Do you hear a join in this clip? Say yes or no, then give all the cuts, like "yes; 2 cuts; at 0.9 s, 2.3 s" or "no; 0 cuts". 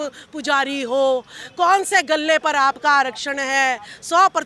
no; 0 cuts